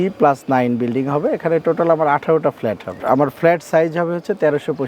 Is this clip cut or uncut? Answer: cut